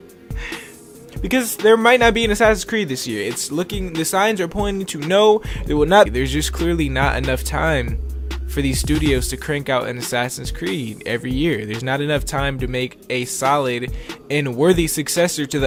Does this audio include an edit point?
no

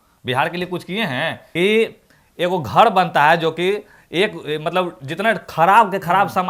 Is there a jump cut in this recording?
yes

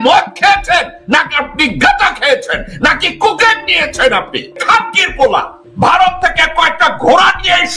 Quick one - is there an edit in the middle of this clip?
yes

